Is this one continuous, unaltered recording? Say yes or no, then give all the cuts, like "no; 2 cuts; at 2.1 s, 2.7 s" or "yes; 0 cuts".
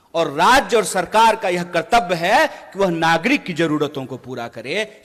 yes; 0 cuts